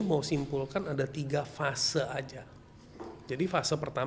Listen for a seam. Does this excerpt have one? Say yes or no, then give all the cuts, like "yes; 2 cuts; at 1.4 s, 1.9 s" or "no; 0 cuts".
no; 0 cuts